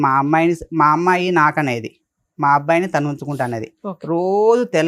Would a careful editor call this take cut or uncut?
uncut